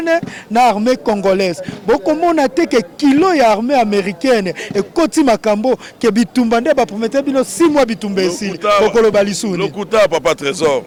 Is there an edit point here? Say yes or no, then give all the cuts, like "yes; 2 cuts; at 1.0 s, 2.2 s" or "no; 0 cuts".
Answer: no; 0 cuts